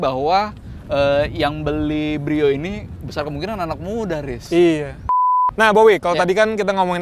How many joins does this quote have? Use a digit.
1